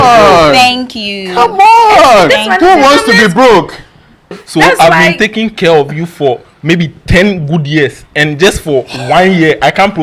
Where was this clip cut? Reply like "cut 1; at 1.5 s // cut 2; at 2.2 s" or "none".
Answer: cut 1; at 4.4 s